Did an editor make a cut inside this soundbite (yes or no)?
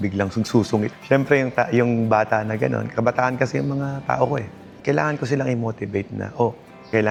no